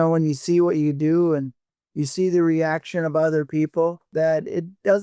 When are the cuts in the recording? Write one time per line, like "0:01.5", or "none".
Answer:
0:04.0